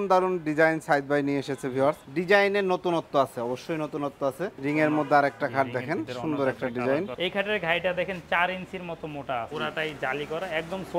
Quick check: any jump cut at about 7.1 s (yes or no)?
yes